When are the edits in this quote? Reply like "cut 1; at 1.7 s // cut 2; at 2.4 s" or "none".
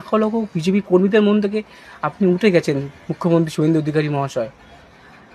none